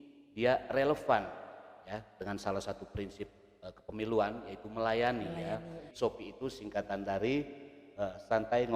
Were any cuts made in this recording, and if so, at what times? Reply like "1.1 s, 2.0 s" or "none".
5.8 s